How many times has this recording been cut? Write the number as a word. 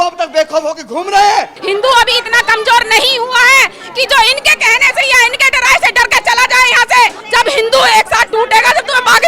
two